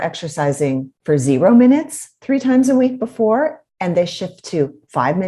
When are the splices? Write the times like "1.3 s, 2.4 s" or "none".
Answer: 0.9 s, 3.7 s

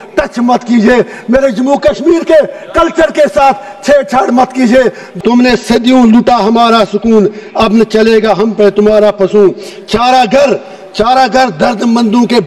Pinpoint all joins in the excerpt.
5.0 s

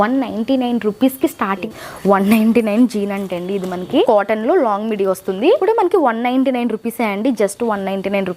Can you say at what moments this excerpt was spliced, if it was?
1.7 s, 4.0 s, 5.6 s

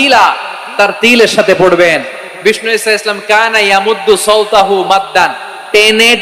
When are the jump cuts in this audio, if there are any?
none

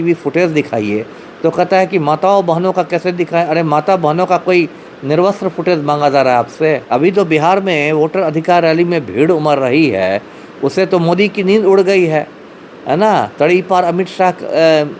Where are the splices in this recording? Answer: 6.8 s

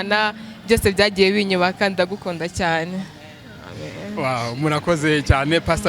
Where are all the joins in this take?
none

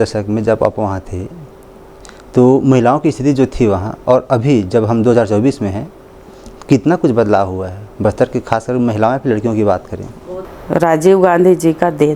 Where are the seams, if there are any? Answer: 10.0 s

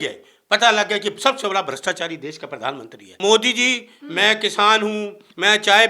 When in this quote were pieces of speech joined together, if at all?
3.1 s

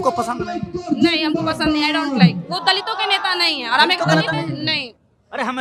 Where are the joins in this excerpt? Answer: none

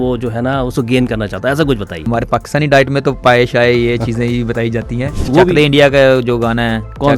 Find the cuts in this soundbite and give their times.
2.1 s, 5.3 s

